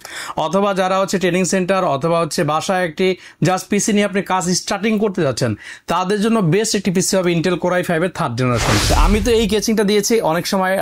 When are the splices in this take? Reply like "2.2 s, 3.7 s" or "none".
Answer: 8.9 s